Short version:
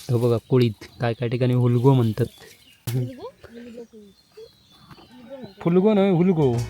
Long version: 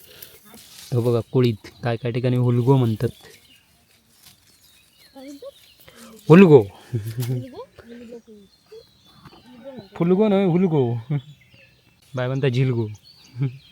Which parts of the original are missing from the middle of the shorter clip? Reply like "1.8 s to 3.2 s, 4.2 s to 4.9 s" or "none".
3.7 s to 7.2 s

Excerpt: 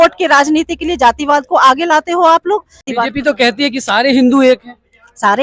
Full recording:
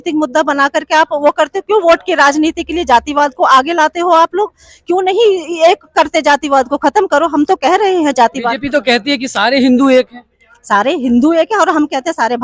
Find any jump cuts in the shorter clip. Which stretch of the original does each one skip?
4.8 s to 8.4 s

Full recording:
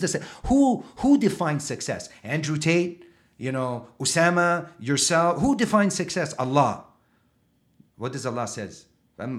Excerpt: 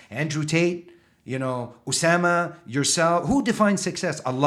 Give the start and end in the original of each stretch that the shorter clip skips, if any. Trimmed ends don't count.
none

